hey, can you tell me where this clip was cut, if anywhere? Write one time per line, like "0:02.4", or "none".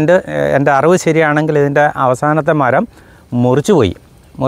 none